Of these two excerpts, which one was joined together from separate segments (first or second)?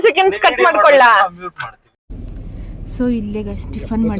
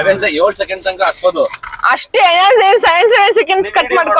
first